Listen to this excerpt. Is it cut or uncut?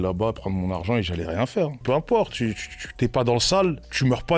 cut